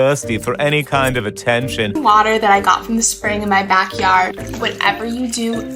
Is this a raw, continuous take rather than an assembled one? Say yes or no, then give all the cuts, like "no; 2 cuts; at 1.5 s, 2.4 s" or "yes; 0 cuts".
no; 1 cut; at 1.9 s